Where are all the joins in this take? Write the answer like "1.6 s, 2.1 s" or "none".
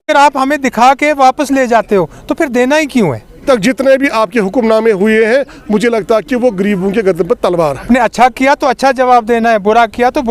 3.4 s, 7.9 s

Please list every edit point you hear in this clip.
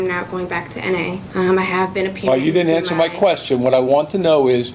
1.2 s

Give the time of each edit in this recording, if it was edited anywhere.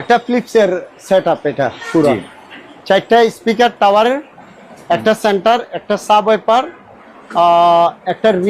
none

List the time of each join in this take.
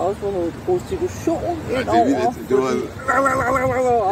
3.1 s

